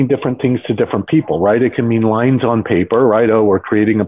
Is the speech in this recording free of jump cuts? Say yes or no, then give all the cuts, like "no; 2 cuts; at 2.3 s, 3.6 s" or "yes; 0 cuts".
yes; 0 cuts